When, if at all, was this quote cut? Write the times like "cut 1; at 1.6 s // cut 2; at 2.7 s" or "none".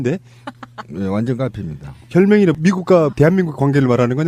none